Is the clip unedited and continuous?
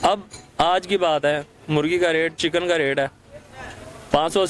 yes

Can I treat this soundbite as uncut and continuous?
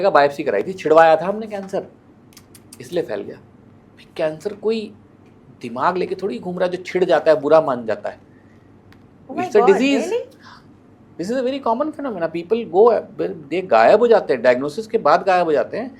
yes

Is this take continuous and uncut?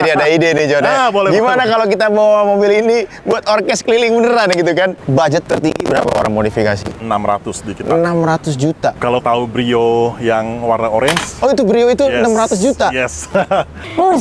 no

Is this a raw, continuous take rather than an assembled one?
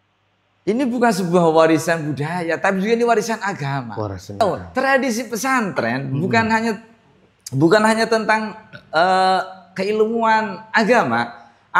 no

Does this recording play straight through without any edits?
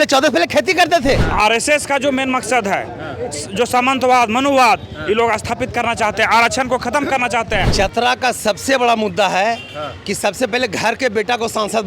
no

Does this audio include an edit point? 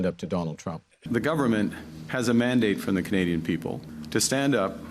yes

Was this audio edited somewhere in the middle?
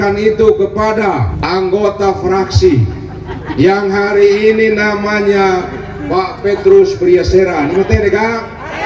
yes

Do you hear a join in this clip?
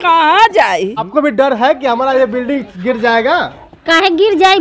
no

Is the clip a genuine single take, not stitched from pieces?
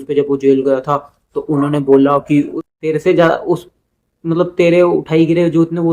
no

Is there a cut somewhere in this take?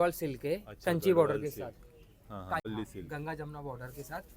yes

